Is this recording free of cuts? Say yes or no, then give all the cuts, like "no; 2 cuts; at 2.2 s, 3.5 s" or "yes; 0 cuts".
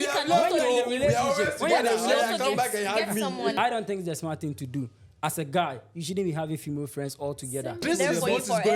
no; 2 cuts; at 3.6 s, 7.8 s